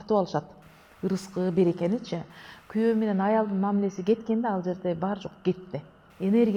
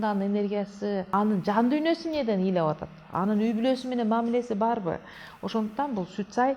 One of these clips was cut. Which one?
second; 1 cut; at 1.1 s

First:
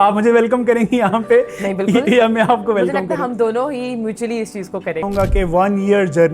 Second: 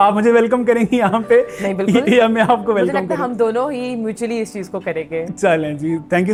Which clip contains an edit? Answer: first; 1 cut; at 5.1 s

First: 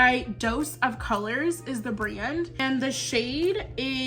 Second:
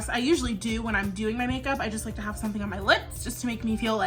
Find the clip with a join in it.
first; 1 cut; at 2.6 s

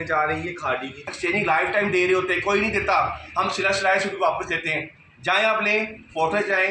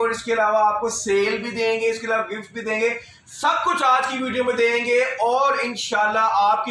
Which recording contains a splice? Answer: first; 1 cut; at 1.1 s

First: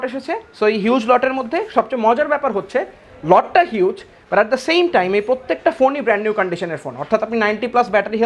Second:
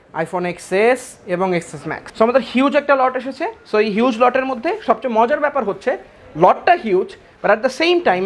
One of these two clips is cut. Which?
second; 1 cut; at 2.0 s

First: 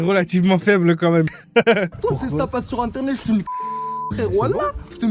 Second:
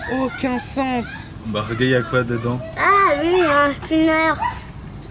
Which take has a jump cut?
first; 1 cut; at 1.4 s

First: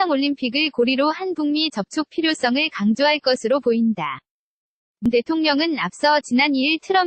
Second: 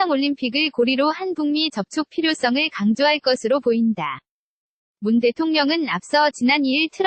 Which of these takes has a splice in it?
first; 1 cut; at 5.1 s

